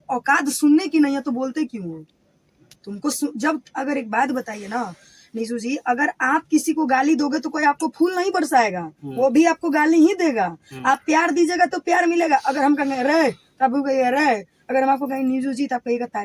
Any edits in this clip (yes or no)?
no